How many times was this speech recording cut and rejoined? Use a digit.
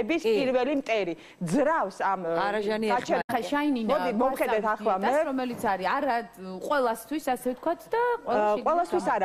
0